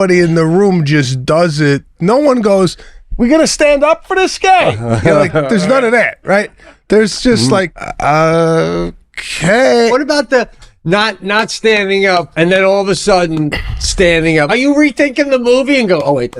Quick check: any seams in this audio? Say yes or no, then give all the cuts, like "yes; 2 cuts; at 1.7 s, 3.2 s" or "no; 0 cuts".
yes; 5 cuts; at 1.9 s, 7.8 s, 9.9 s, 12.3 s, 14.5 s